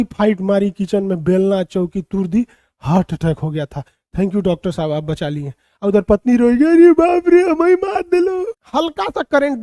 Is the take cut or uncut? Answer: cut